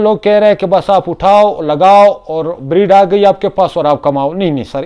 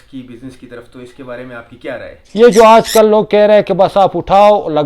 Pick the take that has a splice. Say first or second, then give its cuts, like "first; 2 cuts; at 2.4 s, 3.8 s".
second; 1 cut; at 2.2 s